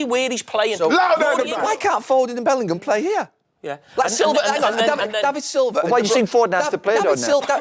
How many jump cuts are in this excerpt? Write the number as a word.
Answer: one